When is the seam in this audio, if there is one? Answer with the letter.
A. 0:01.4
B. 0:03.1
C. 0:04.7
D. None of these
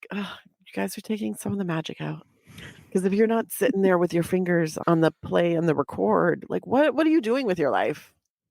C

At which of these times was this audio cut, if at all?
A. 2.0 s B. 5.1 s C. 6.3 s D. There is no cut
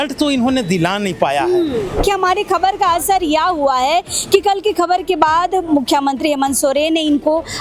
A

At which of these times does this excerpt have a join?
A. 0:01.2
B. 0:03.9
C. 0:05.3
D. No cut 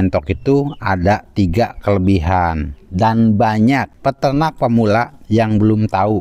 B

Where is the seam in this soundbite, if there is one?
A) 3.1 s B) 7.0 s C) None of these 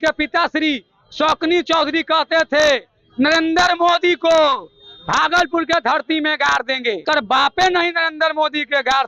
B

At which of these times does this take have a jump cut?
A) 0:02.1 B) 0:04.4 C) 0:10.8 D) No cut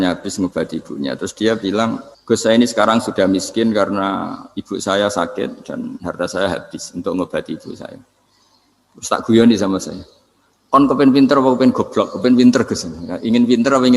A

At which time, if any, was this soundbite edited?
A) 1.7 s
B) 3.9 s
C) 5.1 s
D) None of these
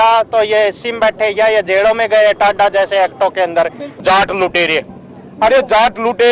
B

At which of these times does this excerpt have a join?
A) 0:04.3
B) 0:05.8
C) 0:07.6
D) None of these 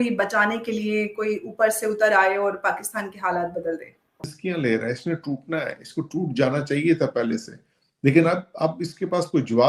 A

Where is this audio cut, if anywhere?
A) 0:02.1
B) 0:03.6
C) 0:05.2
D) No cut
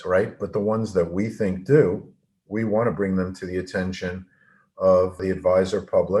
C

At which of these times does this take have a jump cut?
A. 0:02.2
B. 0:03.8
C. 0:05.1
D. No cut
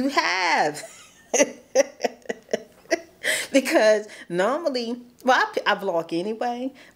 D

